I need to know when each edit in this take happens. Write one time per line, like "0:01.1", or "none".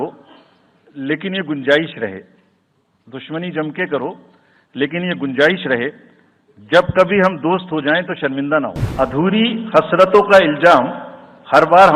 0:08.8

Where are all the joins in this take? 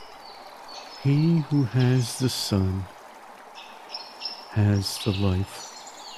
0:01.0
0:05.5

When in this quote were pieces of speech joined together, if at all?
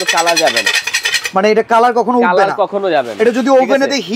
none

